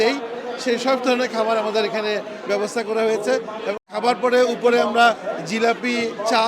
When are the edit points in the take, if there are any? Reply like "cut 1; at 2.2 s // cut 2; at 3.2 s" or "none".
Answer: cut 1; at 3.8 s

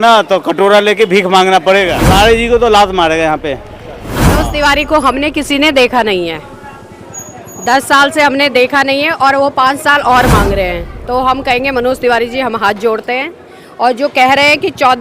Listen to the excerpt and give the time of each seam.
cut 1; at 2.0 s // cut 2; at 4.4 s

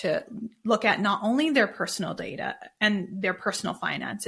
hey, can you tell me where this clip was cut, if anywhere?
none

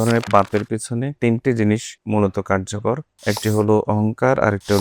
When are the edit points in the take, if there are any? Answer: cut 1; at 1.1 s // cut 2; at 1.9 s // cut 3; at 3.1 s

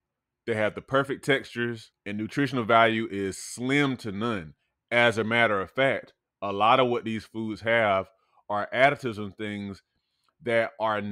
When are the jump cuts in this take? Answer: cut 1; at 1.9 s

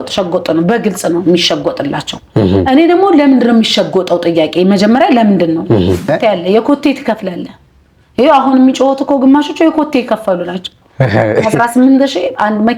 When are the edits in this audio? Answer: cut 1; at 6.1 s

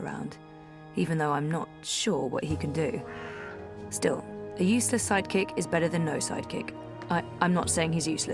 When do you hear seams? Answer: none

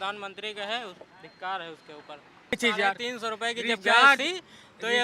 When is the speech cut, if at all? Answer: cut 1; at 2.5 s

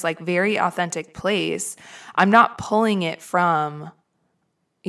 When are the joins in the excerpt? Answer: none

